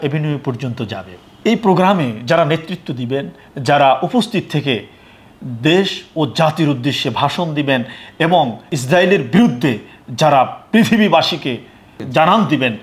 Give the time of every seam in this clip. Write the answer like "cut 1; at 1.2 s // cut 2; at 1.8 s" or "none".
cut 1; at 1.4 s